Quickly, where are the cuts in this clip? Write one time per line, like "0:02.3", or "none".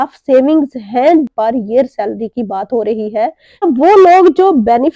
0:01.3
0:03.6